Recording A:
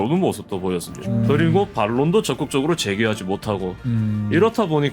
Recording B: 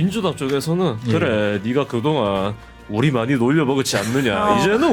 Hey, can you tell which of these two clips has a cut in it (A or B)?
A